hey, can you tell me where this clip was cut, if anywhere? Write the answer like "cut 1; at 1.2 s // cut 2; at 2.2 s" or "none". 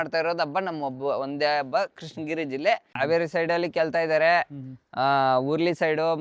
cut 1; at 2.9 s